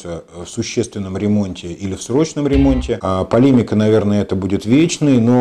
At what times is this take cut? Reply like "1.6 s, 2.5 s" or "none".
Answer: 3.0 s